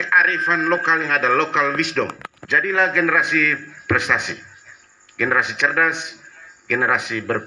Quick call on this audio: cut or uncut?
cut